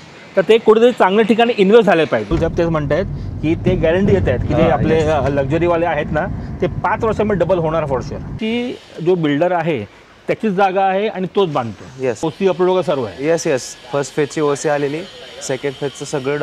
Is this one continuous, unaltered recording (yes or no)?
no